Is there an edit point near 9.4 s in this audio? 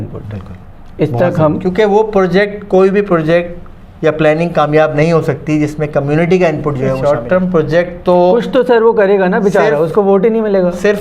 no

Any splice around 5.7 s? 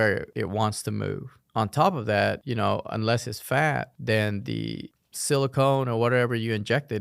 no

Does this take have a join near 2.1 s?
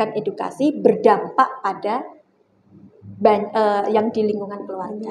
no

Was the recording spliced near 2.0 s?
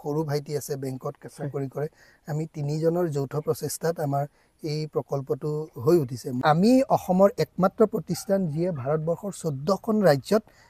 no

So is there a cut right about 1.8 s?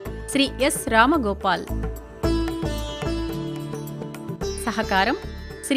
yes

